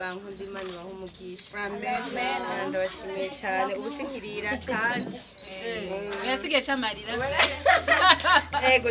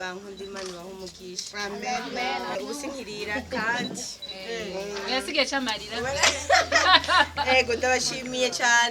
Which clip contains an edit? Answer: second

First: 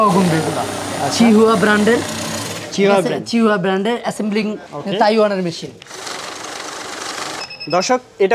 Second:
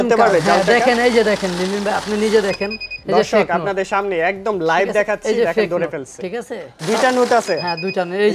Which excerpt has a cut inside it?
first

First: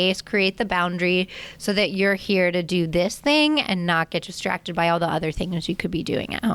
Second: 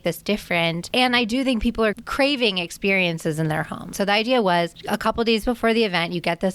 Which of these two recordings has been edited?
second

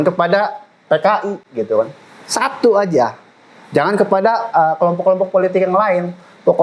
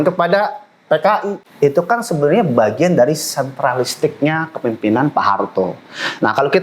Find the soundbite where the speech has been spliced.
second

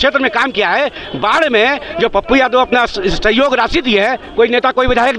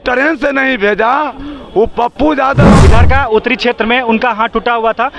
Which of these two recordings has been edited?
second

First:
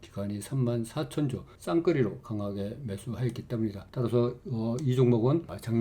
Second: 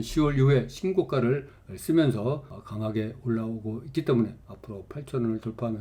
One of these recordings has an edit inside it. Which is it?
first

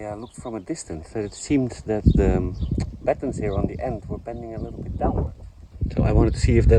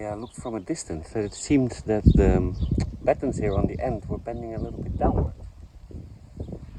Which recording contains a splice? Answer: first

